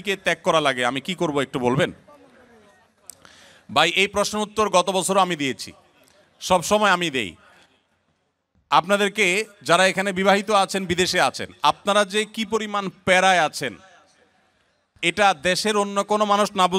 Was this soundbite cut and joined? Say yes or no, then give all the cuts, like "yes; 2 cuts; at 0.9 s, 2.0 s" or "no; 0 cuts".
no; 0 cuts